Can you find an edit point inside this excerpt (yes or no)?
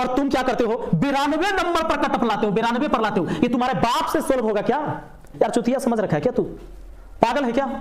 yes